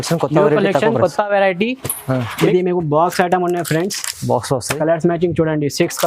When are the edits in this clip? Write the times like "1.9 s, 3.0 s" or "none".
2.4 s